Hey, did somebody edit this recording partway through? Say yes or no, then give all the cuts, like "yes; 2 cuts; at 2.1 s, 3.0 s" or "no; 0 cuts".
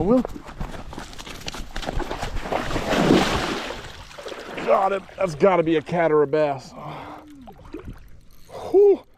no; 0 cuts